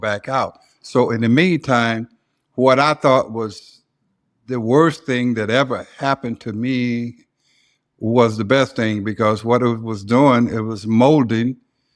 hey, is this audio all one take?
yes; 0 cuts

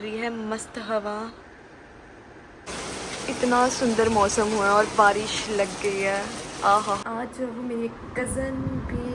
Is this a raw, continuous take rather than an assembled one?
no; 2 cuts; at 2.6 s, 7.0 s

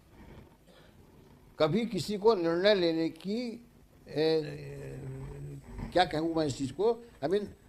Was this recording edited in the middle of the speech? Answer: no; 0 cuts

